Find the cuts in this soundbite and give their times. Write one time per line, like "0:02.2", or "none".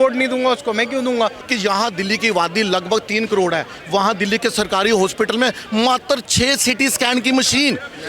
0:01.4